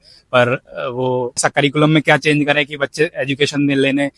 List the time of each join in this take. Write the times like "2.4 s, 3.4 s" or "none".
1.4 s